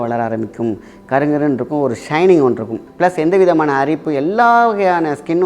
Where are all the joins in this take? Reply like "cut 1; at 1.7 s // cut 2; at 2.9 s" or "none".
cut 1; at 2.8 s